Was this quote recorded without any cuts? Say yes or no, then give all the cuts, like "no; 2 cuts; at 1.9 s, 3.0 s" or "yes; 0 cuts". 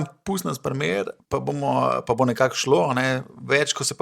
no; 1 cut; at 1.2 s